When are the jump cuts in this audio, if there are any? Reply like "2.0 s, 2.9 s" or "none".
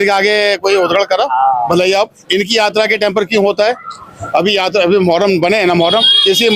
none